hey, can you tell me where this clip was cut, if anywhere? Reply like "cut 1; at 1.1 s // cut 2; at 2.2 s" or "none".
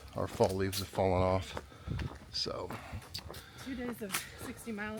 none